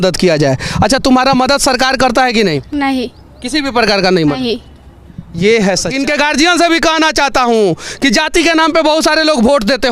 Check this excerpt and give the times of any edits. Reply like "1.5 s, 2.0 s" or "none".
5.9 s